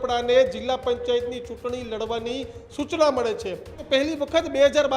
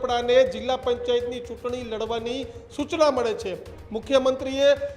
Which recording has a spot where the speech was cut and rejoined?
first; 1 cut; at 3.7 s

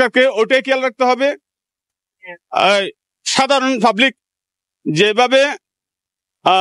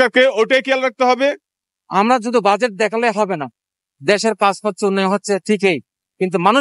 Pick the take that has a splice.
second; 1 cut; at 1.8 s

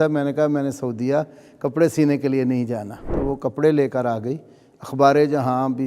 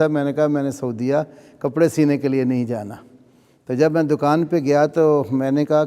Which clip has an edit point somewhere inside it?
first; 1 cut; at 3.1 s

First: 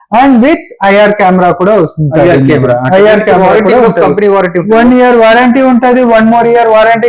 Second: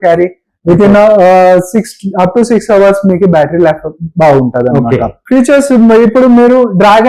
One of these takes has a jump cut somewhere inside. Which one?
second; 1 cut; at 5.2 s

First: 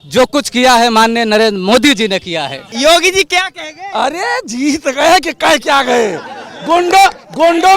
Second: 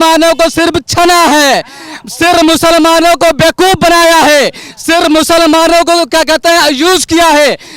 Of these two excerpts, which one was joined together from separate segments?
first; 1 cut; at 2.7 s

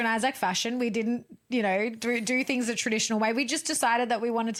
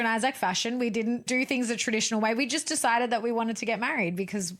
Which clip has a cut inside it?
second; 1 cut; at 1.2 s

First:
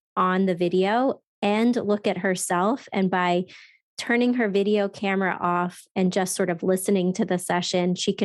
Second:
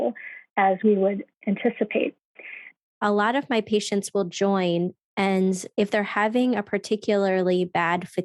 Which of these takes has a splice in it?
second; 2 cuts; at 0.8 s, 2.9 s

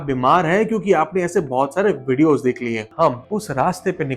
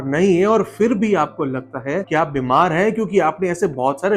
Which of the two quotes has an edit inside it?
first; 1 cut; at 2.9 s

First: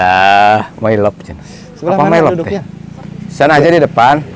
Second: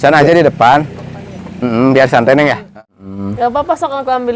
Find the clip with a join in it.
second; 1 cut; at 2.7 s

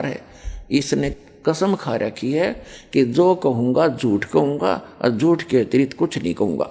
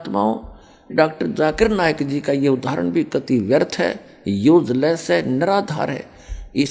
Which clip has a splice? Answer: second; 1 cut; at 0.9 s

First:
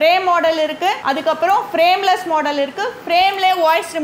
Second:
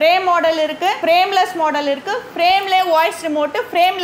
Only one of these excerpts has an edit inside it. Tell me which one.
second; 1 cut; at 1.0 s

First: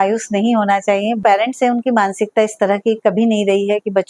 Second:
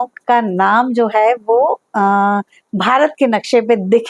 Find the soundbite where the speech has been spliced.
first; 1 cut; at 1.2 s

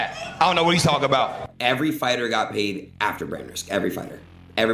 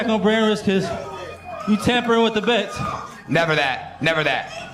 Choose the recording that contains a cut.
first; 1 cut; at 1.4 s

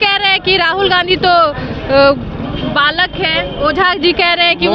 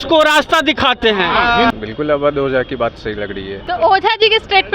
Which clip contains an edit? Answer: second; 2 cuts; at 1.7 s, 3.6 s

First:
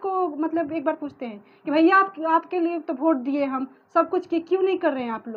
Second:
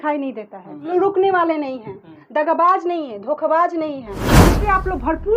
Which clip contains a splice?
second; 2 cuts; at 0.9 s, 4.2 s

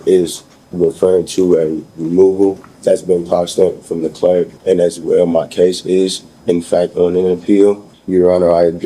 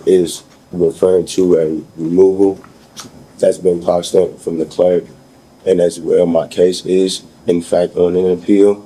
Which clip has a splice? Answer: first; 3 cuts; at 2.7 s, 4.5 s, 7.9 s

